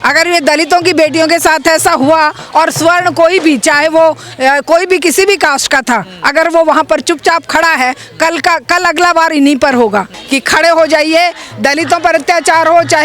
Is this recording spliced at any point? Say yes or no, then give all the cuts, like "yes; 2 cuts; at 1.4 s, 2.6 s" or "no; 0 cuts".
yes; 1 cut; at 10.2 s